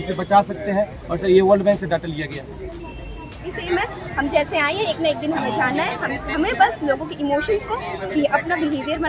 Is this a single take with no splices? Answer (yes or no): no